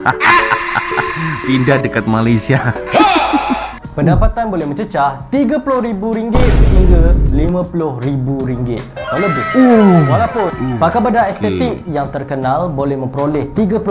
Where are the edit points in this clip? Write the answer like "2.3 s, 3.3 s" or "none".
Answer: 3.8 s, 10.6 s